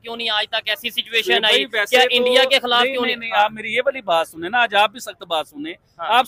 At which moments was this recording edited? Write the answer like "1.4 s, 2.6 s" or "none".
none

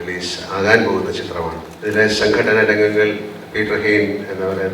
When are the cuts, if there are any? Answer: 1.7 s

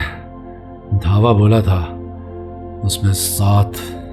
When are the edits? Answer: none

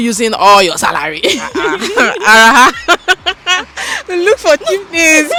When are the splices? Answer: none

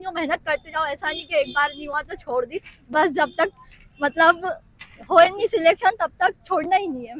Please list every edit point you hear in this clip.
none

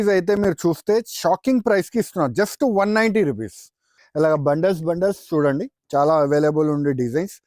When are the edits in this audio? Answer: 4.0 s

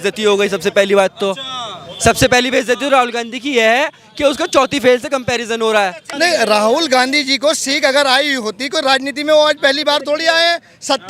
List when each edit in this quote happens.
6.0 s

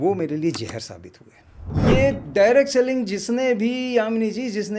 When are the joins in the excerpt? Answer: 1.9 s

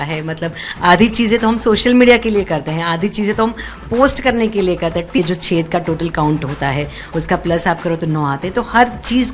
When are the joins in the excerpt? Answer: 5.2 s

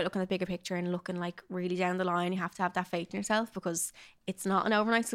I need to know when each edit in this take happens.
none

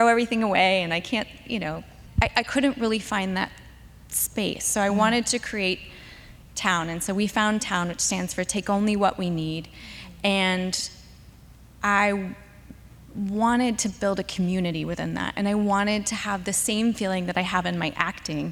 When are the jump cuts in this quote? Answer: none

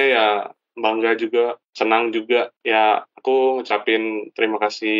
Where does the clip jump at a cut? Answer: 1.6 s, 2.6 s

